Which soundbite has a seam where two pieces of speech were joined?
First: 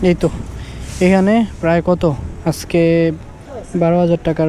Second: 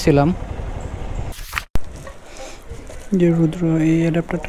second; 1 cut; at 1.4 s

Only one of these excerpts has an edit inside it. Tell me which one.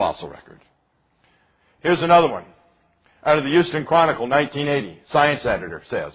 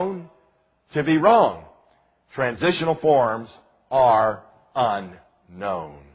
second; 1 cut; at 4.2 s

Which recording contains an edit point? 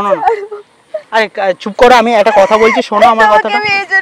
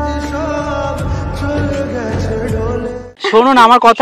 second; 1 cut; at 3.0 s

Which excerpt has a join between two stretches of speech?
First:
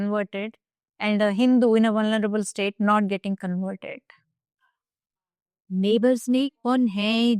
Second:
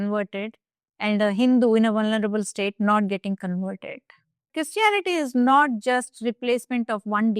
second; 1 cut; at 4.5 s

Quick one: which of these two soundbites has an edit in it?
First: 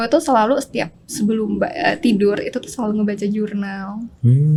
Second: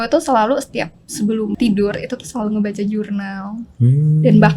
second; 1 cut; at 1.6 s

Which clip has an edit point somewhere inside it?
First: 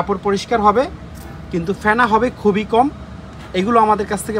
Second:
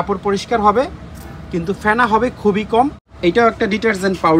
second; 1 cut; at 3.0 s

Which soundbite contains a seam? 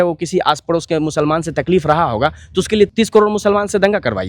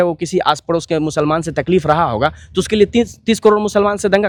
first; 1 cut; at 2.9 s

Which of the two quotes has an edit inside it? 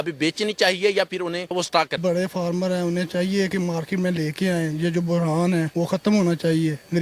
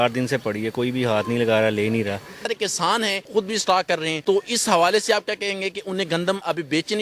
second; 1 cut; at 2.5 s

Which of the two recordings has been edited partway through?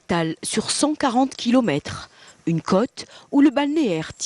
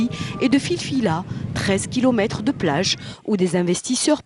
first; 1 cut; at 2.4 s

